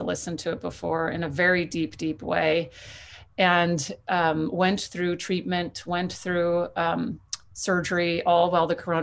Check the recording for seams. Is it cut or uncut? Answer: uncut